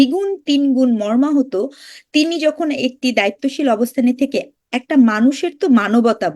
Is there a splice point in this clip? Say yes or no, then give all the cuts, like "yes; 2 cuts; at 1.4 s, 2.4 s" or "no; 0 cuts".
no; 0 cuts